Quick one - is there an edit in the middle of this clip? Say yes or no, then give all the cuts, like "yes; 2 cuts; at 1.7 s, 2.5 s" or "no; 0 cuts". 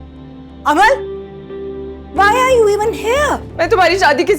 yes; 1 cut; at 3.5 s